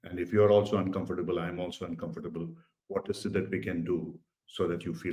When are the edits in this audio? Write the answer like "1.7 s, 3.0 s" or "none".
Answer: none